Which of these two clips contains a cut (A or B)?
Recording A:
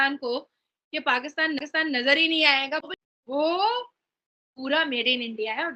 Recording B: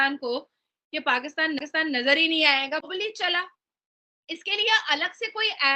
A